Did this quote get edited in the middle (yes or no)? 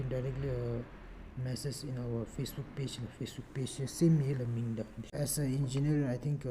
yes